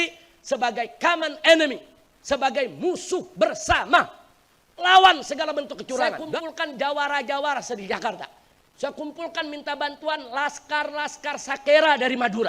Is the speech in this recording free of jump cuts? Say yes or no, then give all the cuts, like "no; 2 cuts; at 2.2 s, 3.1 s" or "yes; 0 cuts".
no; 1 cut; at 6.4 s